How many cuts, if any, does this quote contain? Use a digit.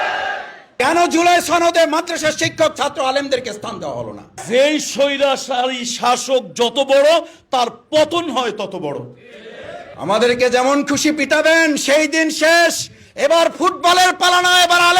3